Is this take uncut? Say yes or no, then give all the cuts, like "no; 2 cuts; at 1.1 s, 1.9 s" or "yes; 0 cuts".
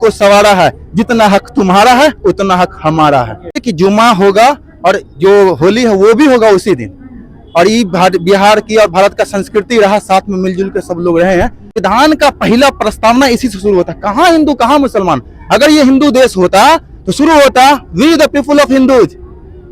no; 2 cuts; at 3.7 s, 11.8 s